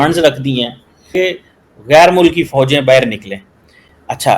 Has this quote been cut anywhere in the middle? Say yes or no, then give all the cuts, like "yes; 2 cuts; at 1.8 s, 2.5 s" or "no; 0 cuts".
yes; 1 cut; at 1.1 s